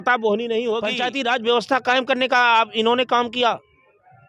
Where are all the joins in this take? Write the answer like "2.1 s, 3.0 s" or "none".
0.9 s